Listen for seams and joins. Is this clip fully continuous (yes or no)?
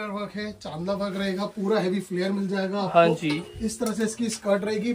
yes